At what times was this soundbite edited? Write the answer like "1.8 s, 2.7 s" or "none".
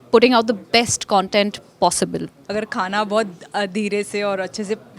2.4 s